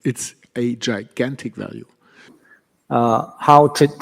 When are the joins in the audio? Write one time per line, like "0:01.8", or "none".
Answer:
0:02.4